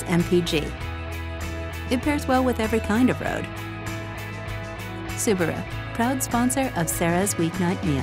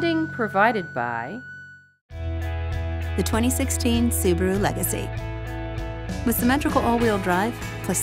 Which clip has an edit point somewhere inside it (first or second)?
second